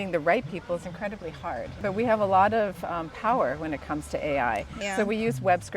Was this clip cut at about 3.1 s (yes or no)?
no